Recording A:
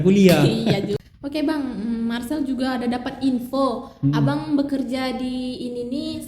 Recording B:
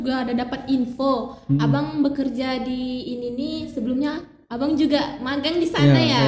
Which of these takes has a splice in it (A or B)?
A